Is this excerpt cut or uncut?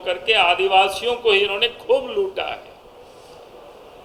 uncut